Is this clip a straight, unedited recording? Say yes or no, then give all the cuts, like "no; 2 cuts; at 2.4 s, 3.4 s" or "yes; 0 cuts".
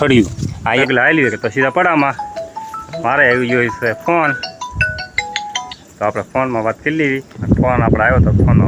no; 2 cuts; at 0.8 s, 7.4 s